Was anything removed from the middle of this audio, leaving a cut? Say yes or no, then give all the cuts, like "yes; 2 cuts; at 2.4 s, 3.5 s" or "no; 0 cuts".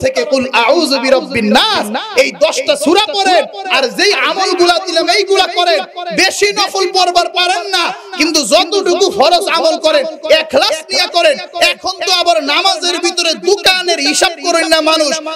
no; 0 cuts